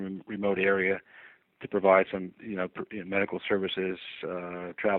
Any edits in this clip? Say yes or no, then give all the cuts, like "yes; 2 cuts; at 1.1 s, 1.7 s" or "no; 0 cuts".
no; 0 cuts